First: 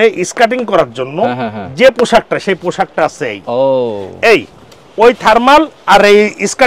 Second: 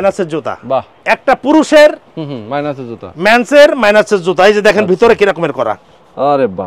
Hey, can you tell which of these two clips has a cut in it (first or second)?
second